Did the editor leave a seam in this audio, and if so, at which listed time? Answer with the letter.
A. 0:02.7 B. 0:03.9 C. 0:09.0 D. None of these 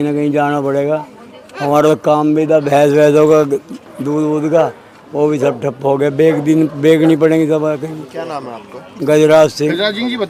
D